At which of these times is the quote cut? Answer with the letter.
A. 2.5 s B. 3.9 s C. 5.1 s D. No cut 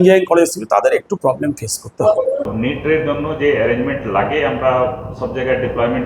A